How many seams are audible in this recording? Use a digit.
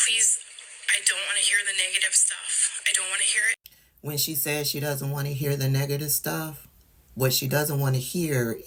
0